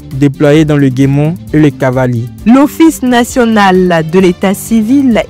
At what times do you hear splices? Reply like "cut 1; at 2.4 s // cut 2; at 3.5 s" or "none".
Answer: none

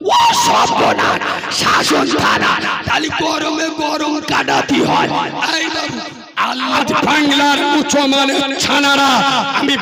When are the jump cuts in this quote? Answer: cut 1; at 6.7 s

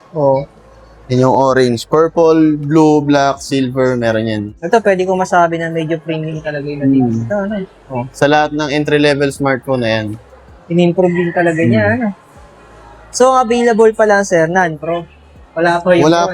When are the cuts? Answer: cut 1; at 4.5 s

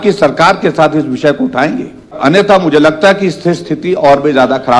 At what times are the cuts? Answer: cut 1; at 2.2 s

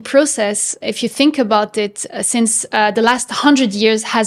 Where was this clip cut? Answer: none

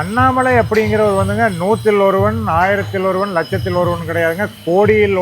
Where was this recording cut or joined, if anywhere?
none

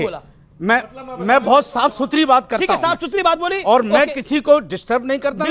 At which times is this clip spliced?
none

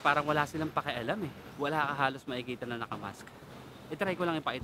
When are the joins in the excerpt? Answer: cut 1; at 1.4 s

